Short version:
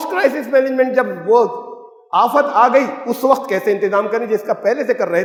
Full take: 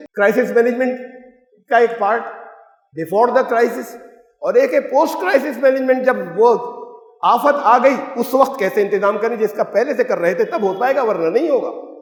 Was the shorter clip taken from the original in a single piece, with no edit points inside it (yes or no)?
yes